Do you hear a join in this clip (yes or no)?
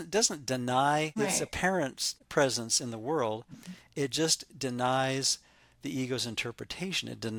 no